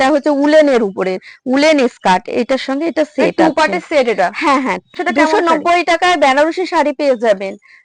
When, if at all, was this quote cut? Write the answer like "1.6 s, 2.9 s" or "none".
4.9 s